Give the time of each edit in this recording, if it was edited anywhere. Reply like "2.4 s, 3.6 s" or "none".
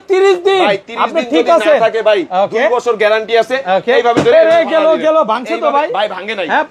none